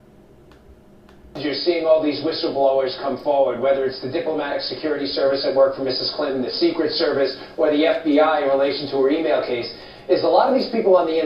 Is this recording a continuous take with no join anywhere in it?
yes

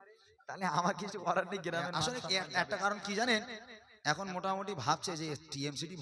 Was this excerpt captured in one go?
no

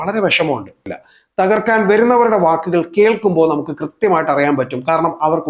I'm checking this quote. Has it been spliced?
yes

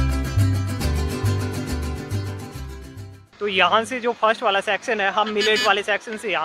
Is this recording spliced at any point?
no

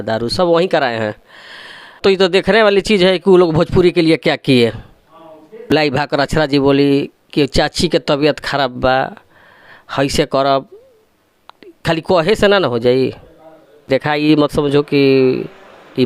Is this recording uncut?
no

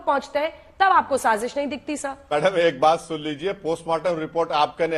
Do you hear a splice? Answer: yes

